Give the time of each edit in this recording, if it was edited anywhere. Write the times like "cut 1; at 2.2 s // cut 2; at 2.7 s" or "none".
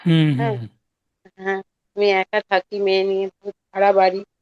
none